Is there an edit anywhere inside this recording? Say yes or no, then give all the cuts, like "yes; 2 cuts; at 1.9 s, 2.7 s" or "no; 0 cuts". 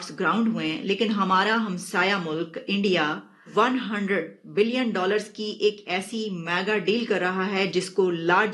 no; 0 cuts